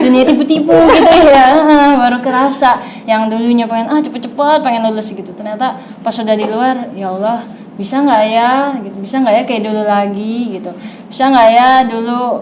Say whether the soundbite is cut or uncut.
uncut